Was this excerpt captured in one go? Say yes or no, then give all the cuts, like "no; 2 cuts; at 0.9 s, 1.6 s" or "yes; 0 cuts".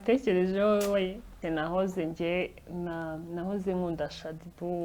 no; 1 cut; at 1.4 s